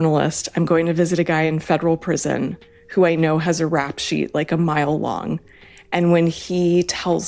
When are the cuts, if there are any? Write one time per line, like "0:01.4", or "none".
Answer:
none